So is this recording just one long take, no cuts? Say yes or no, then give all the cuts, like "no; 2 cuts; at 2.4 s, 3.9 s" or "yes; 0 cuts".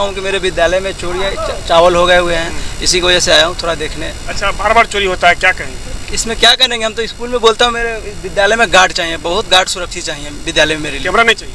yes; 0 cuts